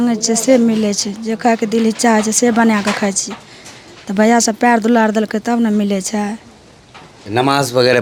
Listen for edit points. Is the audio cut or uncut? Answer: uncut